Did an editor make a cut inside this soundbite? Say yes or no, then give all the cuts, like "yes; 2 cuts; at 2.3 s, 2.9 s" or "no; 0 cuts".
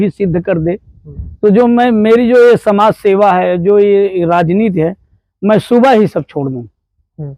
no; 0 cuts